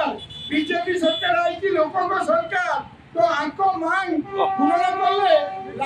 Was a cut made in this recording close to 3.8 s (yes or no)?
no